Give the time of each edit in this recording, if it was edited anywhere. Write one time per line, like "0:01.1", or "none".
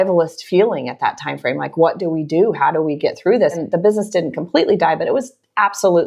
0:03.6